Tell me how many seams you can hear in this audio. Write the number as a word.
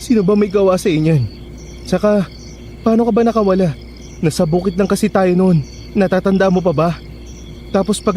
zero